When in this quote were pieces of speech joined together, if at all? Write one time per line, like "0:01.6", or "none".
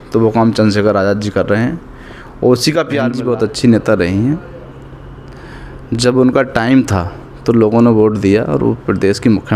0:03.1